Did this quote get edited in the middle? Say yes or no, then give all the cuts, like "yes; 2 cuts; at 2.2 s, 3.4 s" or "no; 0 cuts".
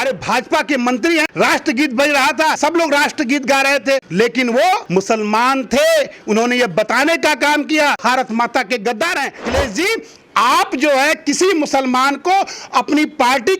yes; 6 cuts; at 1.3 s, 2.6 s, 4.1 s, 4.8 s, 8.0 s, 9.5 s